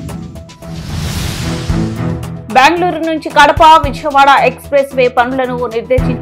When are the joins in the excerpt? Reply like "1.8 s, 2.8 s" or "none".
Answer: 2.4 s